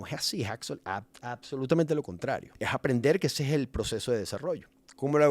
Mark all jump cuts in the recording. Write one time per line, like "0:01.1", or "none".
0:02.5